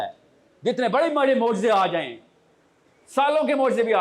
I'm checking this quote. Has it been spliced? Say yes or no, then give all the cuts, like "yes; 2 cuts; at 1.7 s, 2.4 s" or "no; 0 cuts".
no; 0 cuts